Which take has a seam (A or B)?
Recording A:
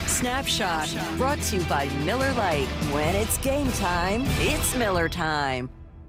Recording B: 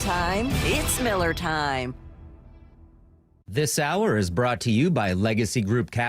B